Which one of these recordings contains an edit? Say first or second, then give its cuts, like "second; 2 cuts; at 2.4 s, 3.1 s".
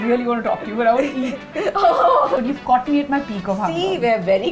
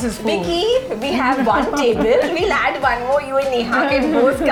first; 1 cut; at 2.4 s